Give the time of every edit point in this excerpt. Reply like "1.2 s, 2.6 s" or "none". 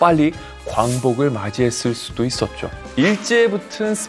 2.9 s